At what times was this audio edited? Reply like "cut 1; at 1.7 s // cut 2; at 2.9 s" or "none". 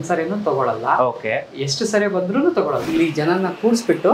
cut 1; at 2.8 s

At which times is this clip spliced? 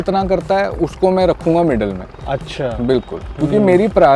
none

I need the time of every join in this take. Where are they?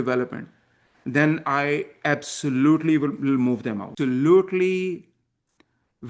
cut 1; at 3.9 s

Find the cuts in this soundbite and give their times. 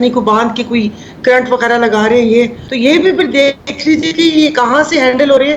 cut 1; at 2.6 s

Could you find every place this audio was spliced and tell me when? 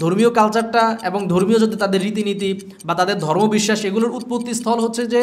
none

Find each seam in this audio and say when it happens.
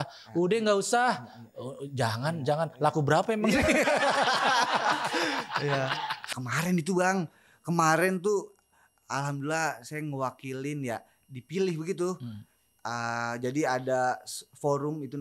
cut 1; at 6.3 s

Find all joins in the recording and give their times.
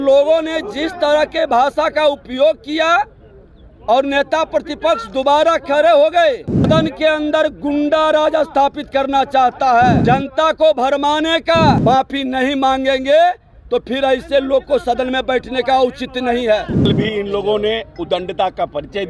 cut 1; at 6.7 s // cut 2; at 10.0 s // cut 3; at 11.8 s // cut 4; at 16.9 s

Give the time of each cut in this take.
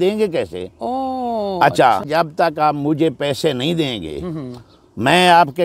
cut 1; at 2.0 s

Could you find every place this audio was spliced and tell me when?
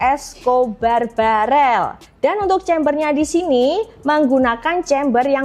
cut 1; at 2.0 s

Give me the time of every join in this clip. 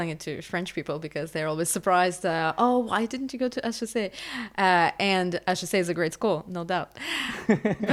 none

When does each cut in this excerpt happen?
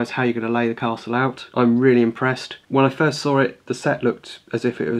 cut 1; at 1.5 s // cut 2; at 2.5 s

